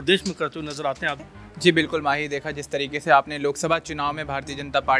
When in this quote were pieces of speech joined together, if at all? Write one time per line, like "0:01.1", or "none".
0:01.3